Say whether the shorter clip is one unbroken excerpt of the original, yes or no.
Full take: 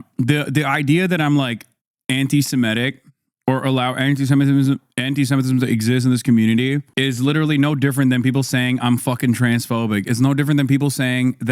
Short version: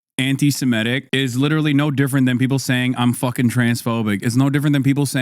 no